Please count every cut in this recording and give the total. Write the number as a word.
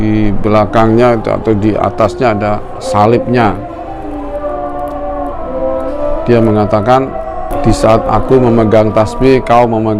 one